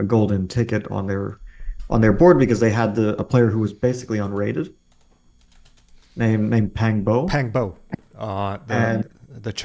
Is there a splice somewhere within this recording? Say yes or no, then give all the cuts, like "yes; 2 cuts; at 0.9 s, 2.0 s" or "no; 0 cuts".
no; 0 cuts